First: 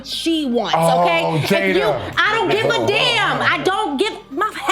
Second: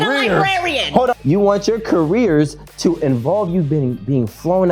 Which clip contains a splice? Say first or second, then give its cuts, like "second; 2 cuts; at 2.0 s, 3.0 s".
second; 1 cut; at 1.1 s